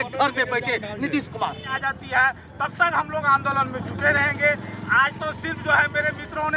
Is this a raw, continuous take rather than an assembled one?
no; 1 cut; at 1.8 s

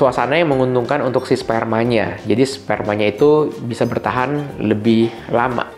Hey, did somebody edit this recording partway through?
no; 0 cuts

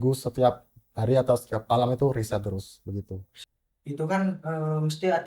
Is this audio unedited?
yes; 0 cuts

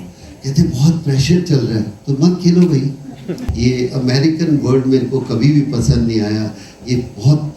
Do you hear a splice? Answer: yes; 1 cut; at 3.4 s

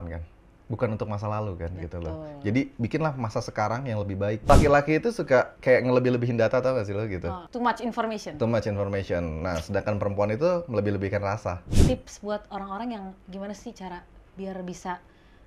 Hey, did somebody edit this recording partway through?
yes; 2 cuts; at 4.4 s, 11.7 s

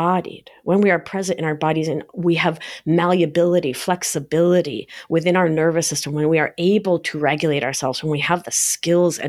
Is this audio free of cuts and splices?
yes; 0 cuts

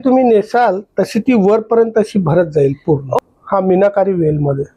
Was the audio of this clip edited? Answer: yes; 1 cut; at 3.2 s

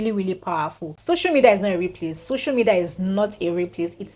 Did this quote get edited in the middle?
yes; 1 cut; at 0.9 s

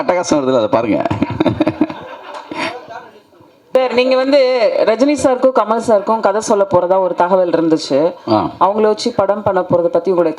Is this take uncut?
no; 1 cut; at 3.7 s

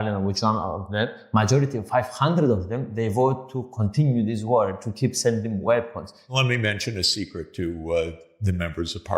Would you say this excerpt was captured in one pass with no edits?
no; 2 cuts; at 1.2 s, 6.3 s

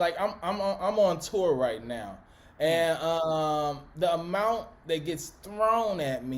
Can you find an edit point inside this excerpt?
no; 0 cuts

